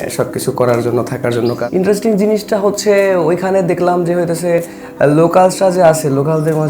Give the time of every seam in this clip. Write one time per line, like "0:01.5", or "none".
0:01.6

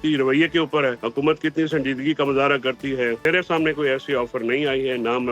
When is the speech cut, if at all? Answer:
0:01.0
0:03.3

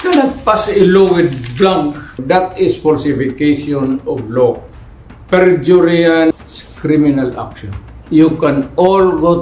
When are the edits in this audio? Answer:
0:02.2
0:06.4

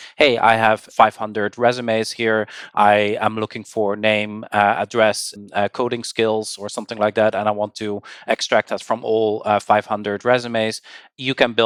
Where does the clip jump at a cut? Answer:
none

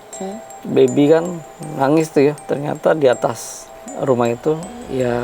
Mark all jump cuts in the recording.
0:02.4

